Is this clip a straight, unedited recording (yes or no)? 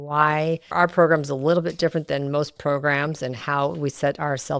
yes